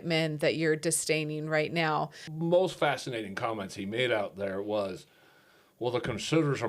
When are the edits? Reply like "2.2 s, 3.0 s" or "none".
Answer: 2.2 s